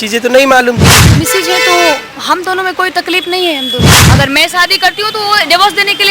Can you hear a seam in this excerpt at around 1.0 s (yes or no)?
yes